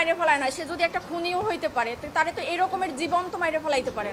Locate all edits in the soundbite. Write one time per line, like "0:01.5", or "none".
none